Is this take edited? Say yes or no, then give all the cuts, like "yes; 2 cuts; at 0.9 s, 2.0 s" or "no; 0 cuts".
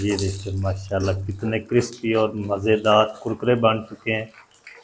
no; 0 cuts